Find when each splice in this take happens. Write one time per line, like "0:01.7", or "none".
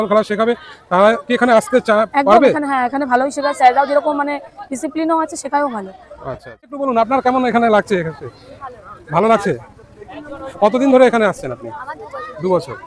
0:06.8